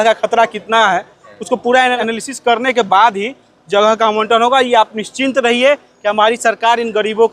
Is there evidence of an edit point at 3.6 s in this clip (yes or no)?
no